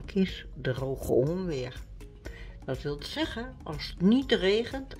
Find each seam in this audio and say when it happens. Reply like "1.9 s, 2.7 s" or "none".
none